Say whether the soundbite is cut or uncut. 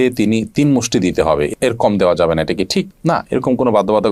uncut